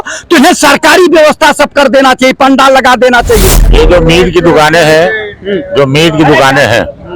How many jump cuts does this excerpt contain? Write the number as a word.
one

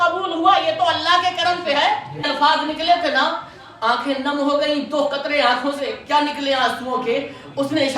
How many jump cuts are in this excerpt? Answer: one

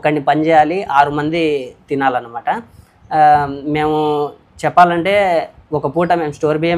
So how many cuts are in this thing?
zero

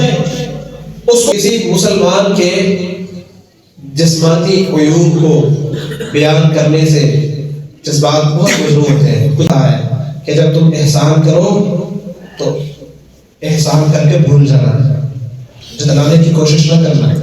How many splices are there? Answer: two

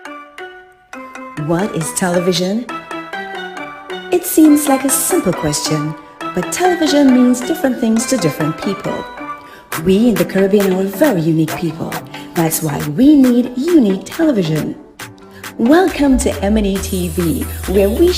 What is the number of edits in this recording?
one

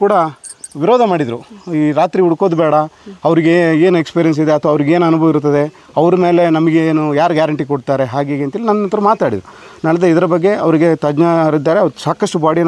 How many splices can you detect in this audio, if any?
zero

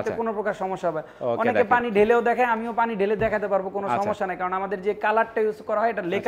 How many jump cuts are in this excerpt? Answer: zero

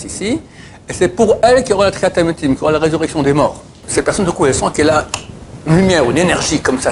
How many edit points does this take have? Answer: one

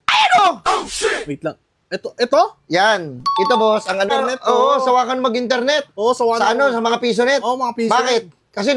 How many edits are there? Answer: one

